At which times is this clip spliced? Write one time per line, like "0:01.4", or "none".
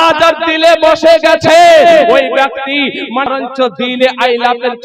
0:03.3